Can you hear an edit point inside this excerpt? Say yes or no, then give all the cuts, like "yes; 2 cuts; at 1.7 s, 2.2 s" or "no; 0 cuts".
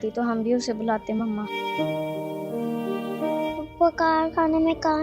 yes; 2 cuts; at 1.5 s, 3.2 s